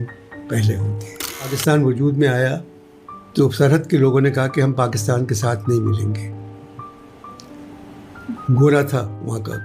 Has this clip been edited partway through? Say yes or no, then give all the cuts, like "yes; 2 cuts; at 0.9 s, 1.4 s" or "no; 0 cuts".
yes; 1 cut; at 1.5 s